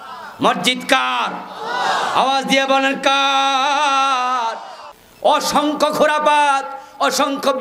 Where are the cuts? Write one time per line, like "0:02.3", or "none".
0:04.7